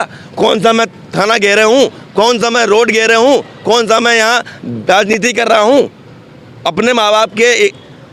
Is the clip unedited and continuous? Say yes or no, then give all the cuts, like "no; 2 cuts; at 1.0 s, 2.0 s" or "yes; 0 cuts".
yes; 0 cuts